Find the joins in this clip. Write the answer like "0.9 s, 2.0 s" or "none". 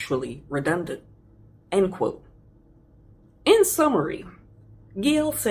none